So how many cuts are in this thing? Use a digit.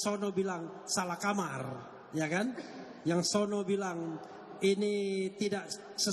0